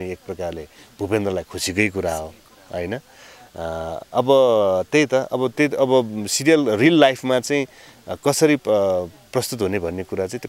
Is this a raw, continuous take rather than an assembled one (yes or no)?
yes